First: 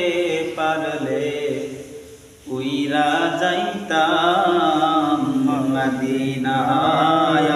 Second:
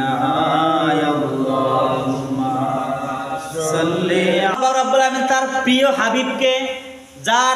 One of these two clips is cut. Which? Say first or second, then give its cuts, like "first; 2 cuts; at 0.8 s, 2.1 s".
second; 1 cut; at 4.6 s